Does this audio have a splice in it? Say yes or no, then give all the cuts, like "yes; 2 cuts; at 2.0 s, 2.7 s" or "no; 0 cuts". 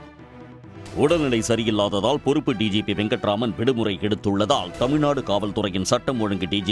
yes; 1 cut; at 0.9 s